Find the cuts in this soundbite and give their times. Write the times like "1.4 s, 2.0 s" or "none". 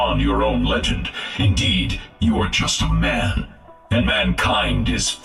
none